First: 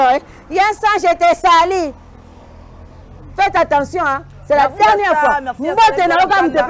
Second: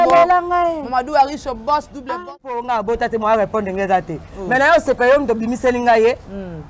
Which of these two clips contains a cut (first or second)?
second